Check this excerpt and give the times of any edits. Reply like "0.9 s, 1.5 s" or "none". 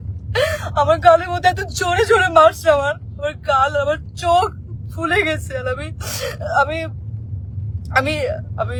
none